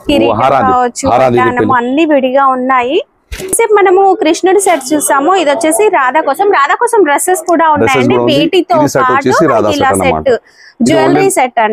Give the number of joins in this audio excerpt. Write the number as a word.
zero